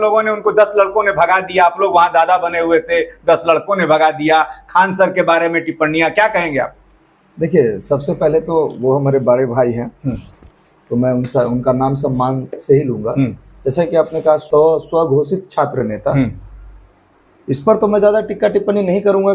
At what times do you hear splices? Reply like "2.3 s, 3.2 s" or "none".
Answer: none

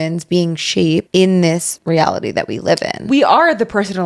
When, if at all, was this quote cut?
1.1 s, 1.7 s, 3.0 s

